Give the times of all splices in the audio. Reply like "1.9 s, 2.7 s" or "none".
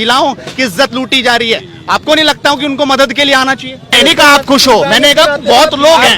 3.9 s